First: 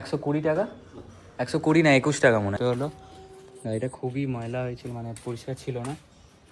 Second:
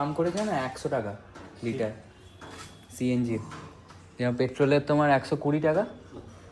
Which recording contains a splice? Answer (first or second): first